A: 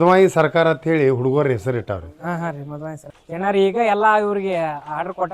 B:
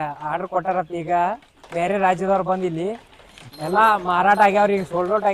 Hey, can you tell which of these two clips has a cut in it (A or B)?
A